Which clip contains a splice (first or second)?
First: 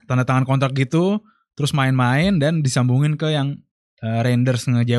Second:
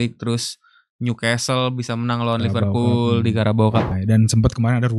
second